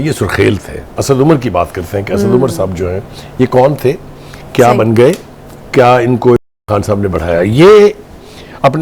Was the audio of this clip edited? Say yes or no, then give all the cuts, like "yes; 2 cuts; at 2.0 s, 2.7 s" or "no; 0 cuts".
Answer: yes; 1 cut; at 0.9 s